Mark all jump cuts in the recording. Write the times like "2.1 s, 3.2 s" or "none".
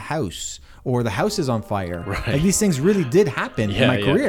none